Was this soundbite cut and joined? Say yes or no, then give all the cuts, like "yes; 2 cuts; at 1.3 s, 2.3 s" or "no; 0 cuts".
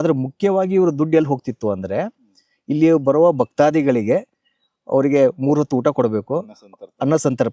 no; 0 cuts